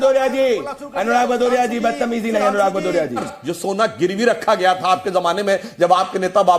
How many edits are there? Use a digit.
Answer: 1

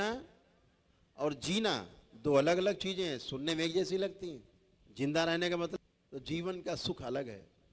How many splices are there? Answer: 1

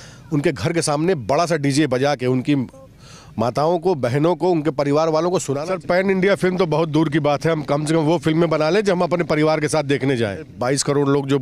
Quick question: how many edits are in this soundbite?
2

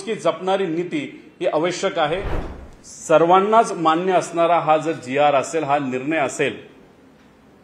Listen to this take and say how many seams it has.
1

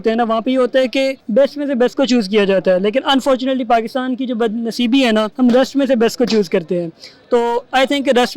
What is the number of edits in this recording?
2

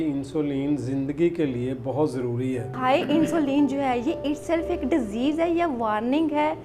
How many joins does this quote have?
1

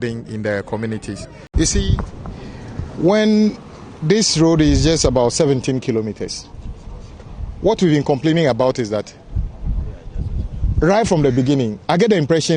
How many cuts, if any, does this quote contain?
1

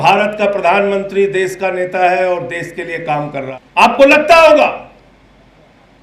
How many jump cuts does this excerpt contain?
1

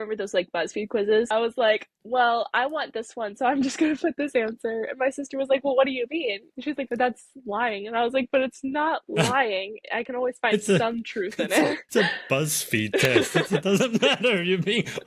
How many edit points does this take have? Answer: 3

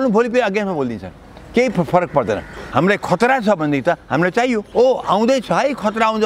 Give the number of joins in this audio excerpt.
2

